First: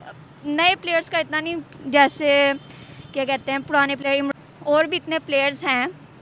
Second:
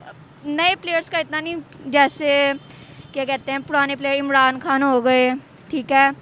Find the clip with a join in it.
first; 1 cut; at 4.3 s

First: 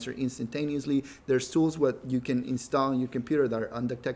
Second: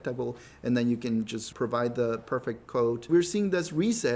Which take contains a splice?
second; 2 cuts; at 1.4 s, 3.1 s

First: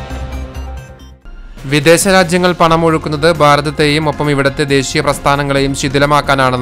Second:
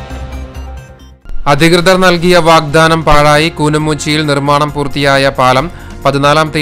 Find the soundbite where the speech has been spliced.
first; 1 cut; at 1.1 s

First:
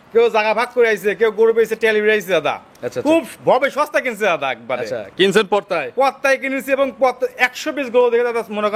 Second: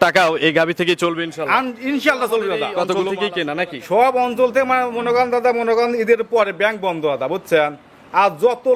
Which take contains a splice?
second; 1 cut; at 3.1 s

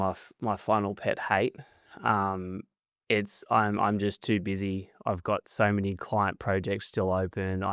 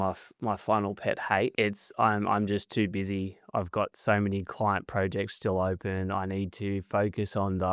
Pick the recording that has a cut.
second; 1 cut; at 1.5 s

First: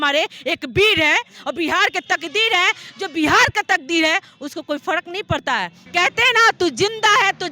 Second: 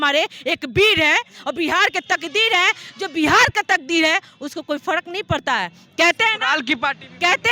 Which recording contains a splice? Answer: first; 1 cut; at 5.8 s

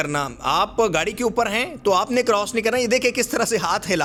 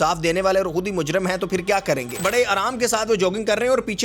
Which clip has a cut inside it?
second; 1 cut; at 2.2 s

